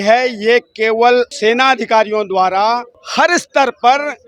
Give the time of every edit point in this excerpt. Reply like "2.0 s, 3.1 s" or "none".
1.3 s, 3.0 s